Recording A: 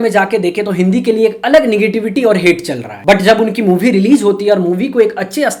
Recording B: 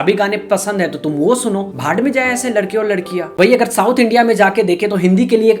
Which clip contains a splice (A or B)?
B